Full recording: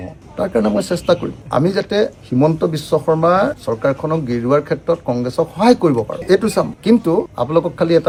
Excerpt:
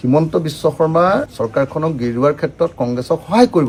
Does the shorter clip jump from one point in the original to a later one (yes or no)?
no